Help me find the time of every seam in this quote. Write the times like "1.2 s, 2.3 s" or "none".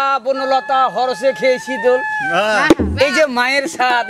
none

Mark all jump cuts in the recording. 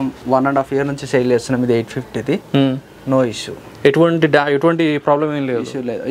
none

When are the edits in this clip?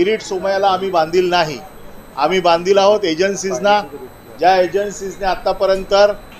none

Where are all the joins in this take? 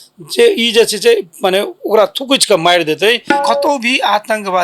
3.3 s

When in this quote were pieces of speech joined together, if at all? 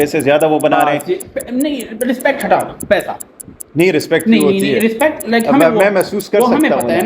none

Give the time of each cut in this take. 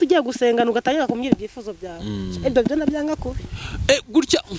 none

